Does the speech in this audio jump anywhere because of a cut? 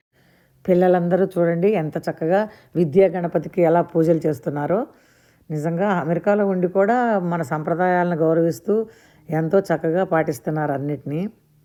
no; 0 cuts

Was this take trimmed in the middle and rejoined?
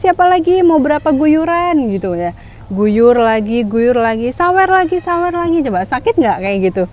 no; 0 cuts

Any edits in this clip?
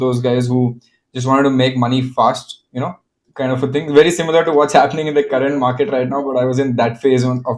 no; 0 cuts

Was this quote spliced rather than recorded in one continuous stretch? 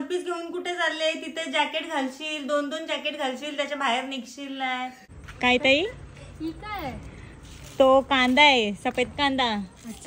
yes; 1 cut; at 5.0 s

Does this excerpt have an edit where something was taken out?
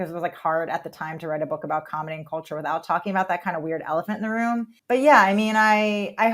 yes; 1 cut; at 4.8 s

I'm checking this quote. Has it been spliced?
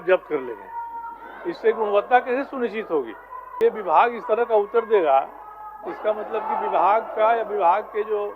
yes; 1 cut; at 3.6 s

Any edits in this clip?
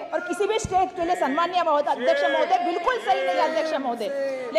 no; 0 cuts

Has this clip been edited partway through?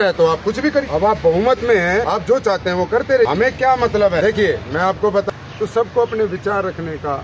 yes; 5 cuts; at 0.9 s, 2.1 s, 3.3 s, 4.2 s, 5.3 s

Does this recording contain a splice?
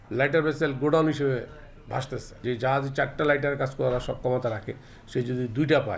no; 0 cuts

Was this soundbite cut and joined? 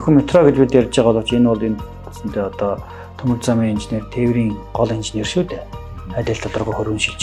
no; 0 cuts

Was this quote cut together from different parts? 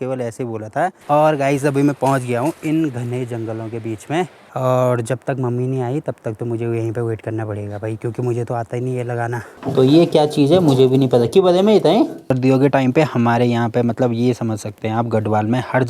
yes; 4 cuts; at 1.0 s, 4.4 s, 9.4 s, 12.3 s

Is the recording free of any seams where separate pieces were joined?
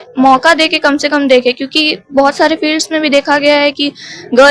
yes; 0 cuts

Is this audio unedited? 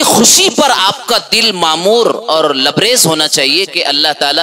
yes; 0 cuts

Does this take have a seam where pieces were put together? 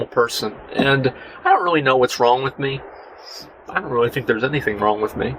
no; 0 cuts

